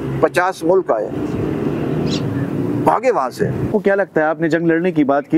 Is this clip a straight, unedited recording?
no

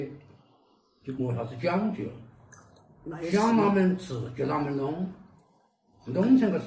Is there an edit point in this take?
yes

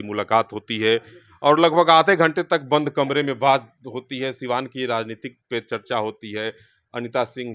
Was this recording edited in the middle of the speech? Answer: no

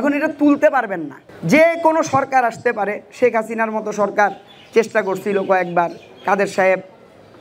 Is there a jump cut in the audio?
no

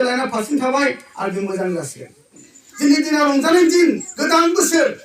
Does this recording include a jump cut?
yes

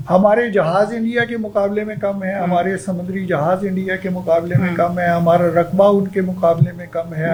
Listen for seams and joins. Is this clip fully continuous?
yes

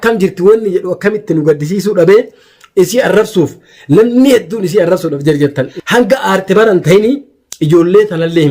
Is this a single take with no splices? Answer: no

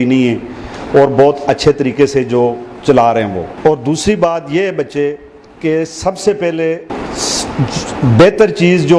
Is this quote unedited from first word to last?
no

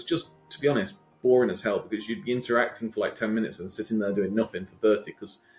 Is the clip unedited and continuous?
yes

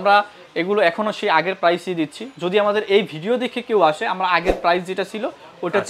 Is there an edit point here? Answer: no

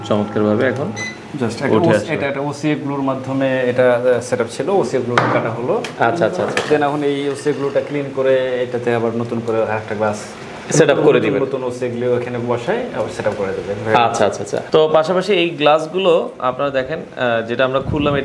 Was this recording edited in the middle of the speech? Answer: no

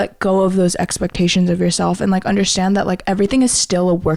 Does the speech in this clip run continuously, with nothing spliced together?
yes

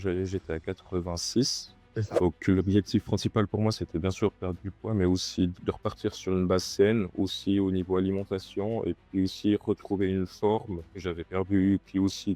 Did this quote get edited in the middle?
no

